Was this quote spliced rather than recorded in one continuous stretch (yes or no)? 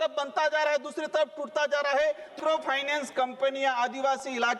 yes